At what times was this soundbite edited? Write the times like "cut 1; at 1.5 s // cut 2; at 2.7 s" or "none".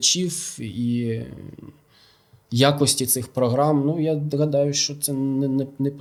none